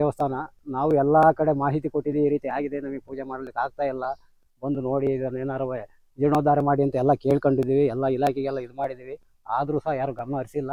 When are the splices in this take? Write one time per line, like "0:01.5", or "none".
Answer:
none